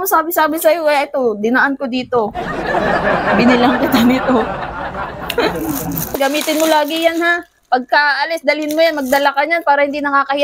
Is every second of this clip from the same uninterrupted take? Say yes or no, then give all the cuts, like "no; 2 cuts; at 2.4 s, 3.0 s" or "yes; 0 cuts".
no; 1 cut; at 6.1 s